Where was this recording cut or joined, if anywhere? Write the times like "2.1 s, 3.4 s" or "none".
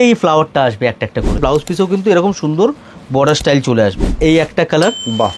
1.4 s, 4.1 s